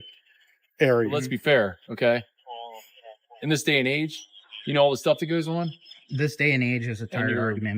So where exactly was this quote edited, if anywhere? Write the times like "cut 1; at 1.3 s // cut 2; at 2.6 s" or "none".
cut 1; at 1.2 s